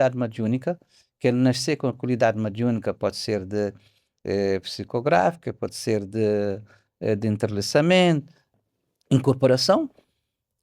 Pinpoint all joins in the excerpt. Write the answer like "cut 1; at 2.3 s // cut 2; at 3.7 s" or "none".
cut 1; at 8.5 s